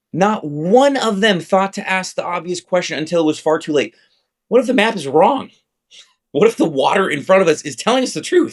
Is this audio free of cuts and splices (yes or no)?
yes